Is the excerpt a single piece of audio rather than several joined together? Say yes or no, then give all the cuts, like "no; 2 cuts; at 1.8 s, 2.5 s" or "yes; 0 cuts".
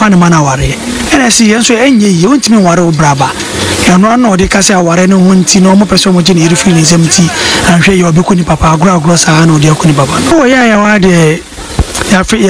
yes; 0 cuts